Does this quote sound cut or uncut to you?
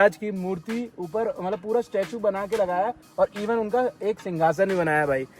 uncut